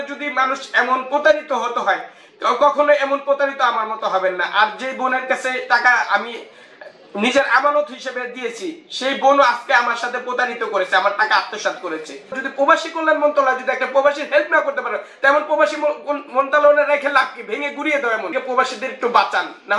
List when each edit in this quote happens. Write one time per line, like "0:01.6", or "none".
0:12.4
0:18.3